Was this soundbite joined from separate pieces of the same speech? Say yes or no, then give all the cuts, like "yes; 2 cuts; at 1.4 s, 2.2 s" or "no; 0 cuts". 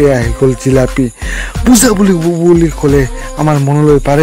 no; 0 cuts